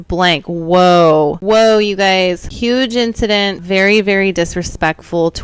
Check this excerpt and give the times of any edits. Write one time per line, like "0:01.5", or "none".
0:01.4
0:02.5
0:03.6